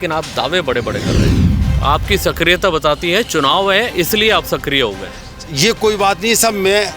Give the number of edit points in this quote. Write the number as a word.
one